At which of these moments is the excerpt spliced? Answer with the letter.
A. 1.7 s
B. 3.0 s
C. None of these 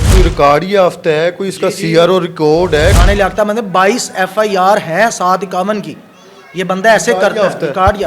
B